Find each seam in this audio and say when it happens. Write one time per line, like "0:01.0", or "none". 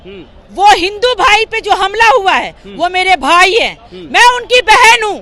none